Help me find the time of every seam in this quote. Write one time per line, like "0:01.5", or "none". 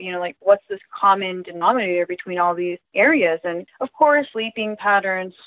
0:02.9
0:03.7
0:04.3